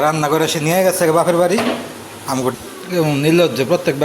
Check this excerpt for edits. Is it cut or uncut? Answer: cut